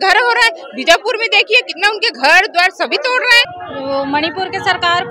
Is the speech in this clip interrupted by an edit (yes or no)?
yes